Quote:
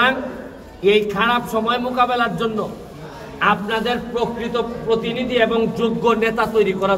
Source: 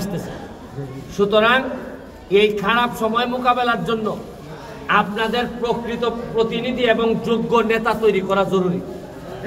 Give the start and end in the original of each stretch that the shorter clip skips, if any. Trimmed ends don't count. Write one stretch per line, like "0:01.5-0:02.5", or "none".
none